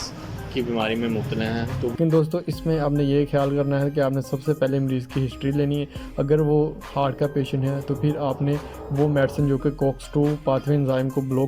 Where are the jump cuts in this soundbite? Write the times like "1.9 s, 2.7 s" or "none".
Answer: 1.9 s